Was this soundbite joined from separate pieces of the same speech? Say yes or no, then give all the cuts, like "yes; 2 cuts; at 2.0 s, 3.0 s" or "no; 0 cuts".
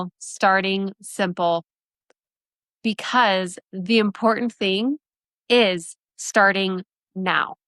no; 0 cuts